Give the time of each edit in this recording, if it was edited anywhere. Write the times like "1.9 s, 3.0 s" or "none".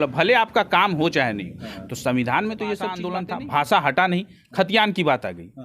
3.1 s